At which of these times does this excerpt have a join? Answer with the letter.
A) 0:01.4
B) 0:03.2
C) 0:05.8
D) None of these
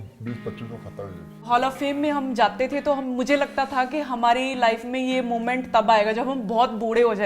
A